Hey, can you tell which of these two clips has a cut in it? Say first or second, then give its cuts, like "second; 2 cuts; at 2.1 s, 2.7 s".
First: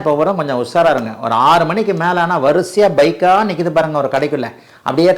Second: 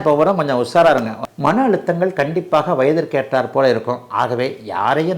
second; 1 cut; at 1.2 s